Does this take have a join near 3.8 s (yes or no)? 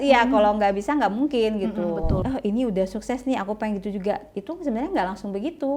no